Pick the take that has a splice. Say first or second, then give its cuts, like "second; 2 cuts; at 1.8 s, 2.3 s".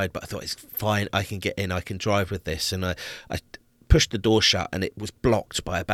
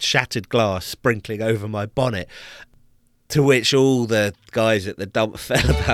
first; 1 cut; at 5.0 s